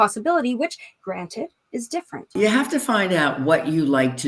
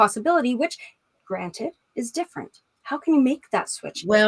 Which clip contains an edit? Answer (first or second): first